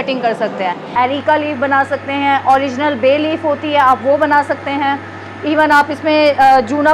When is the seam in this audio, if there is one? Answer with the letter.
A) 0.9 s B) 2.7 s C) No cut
A